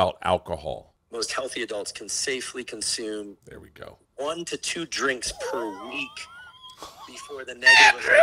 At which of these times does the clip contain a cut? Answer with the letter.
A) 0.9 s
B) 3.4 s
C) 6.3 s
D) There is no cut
A